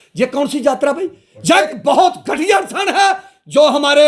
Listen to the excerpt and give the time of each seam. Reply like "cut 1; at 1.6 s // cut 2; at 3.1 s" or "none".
cut 1; at 1.7 s